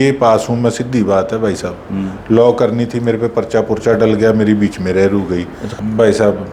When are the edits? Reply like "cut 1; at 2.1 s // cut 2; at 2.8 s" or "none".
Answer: cut 1; at 5.6 s